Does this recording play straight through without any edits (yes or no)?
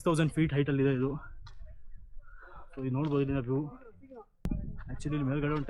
no